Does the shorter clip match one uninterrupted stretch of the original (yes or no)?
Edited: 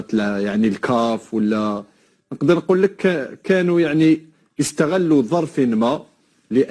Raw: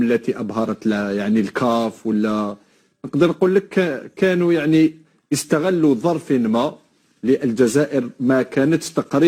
yes